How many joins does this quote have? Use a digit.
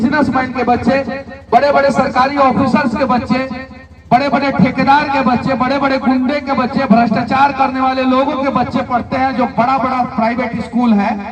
0